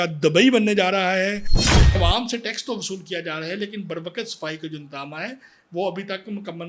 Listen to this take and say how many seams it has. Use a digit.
1